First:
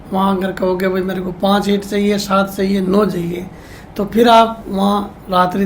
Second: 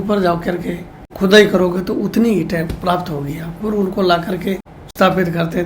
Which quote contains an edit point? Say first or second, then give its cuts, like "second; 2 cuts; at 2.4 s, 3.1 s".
second; 2 cuts; at 1.1 s, 4.8 s